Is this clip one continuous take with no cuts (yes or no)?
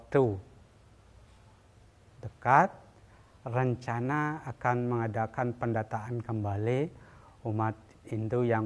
yes